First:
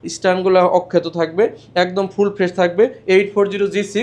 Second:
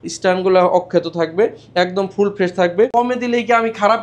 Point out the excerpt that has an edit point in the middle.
second; 1 cut; at 2.9 s

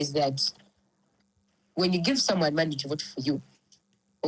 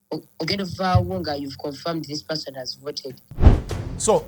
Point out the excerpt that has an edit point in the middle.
second; 1 cut; at 3.3 s

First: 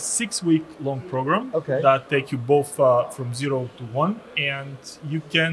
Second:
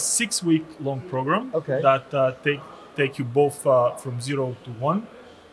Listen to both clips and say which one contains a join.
first; 2 cuts; at 2.0 s, 4.3 s

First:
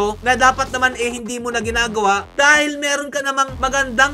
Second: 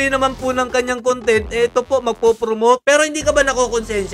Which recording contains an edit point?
second; 1 cut; at 2.8 s

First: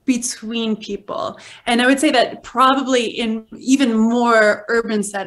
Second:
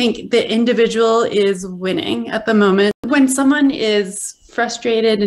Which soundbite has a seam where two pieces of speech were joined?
second; 1 cut; at 3.0 s

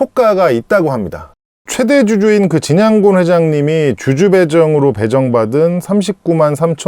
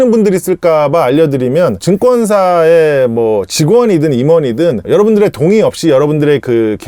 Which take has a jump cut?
first; 1 cut; at 1.6 s

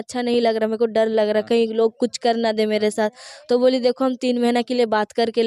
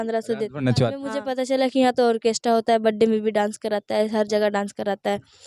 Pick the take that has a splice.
second; 1 cut; at 1.3 s

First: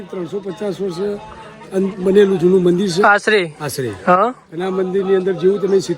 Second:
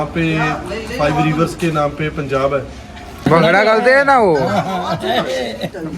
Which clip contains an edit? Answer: second; 1 cut; at 3.3 s

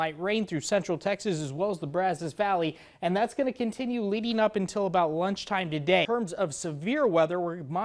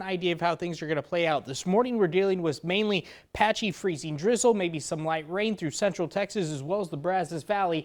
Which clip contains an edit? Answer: first; 1 cut; at 6.1 s

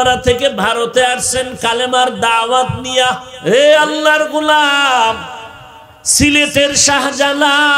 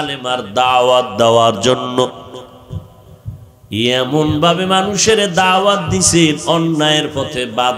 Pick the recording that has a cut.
first; 1 cut; at 3.3 s

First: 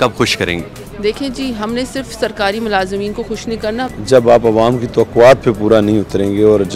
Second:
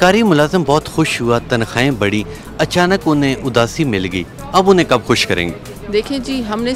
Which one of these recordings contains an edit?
first; 1 cut; at 3.9 s

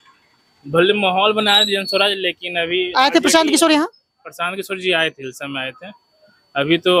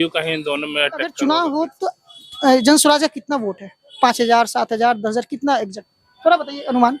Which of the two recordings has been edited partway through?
second; 1 cut; at 1.1 s

